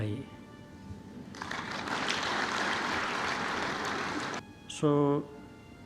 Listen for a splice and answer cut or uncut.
cut